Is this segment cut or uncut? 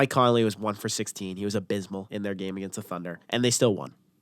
cut